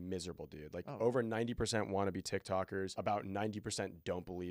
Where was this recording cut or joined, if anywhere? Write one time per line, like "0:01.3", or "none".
0:02.9